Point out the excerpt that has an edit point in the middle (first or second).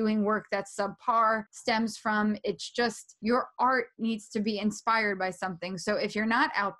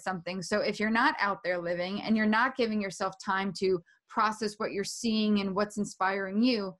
first